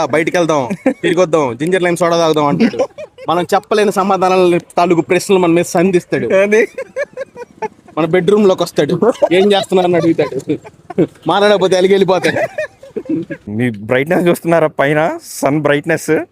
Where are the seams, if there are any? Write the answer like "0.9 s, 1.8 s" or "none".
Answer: 13.5 s